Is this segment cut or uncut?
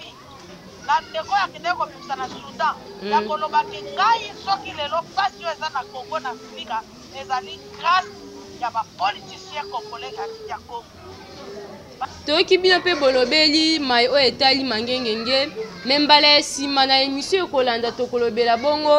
cut